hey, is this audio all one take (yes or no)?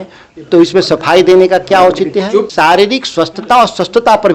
no